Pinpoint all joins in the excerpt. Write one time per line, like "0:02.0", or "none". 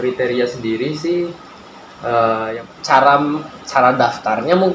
0:02.5